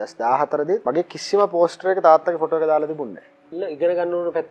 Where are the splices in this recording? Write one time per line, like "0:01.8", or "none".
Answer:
0:00.8
0:03.6

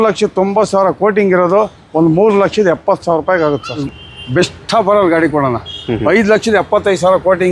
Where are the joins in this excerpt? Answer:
0:03.8

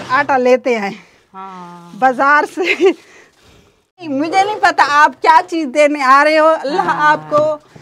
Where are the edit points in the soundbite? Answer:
0:04.1

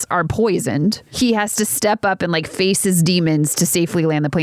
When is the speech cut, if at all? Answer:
0:01.1

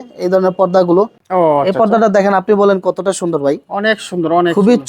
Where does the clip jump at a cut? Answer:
0:01.2

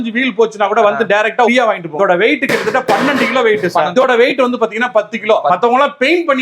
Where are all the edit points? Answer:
0:01.9
0:05.5

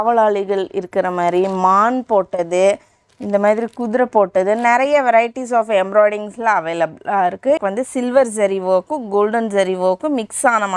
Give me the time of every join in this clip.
0:07.6

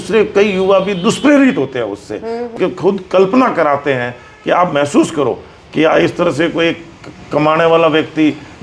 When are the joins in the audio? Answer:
0:02.5

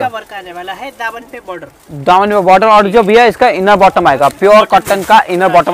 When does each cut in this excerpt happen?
none

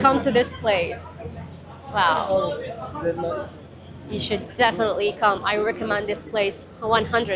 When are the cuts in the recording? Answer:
none

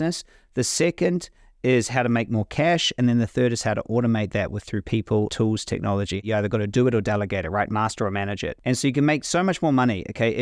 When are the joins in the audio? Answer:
0:08.6

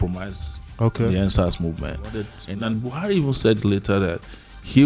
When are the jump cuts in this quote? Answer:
0:02.4

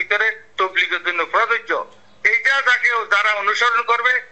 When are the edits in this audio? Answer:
none

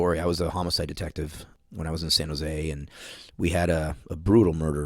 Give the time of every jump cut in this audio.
0:01.5

